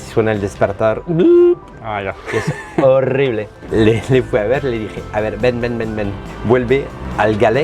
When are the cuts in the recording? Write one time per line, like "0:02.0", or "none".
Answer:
0:03.5